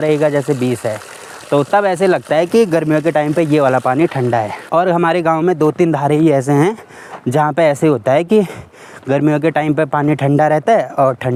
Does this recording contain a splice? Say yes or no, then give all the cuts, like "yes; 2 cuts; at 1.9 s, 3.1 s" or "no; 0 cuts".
no; 0 cuts